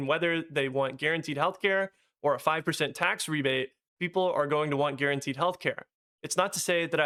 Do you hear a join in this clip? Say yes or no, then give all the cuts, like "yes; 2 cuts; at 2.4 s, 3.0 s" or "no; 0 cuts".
no; 0 cuts